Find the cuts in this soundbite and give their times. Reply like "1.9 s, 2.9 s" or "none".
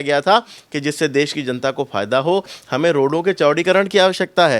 2.5 s